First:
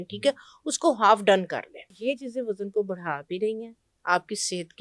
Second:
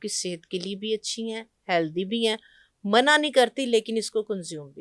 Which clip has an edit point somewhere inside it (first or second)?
first